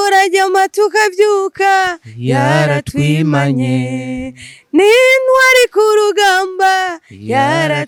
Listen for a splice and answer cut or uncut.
uncut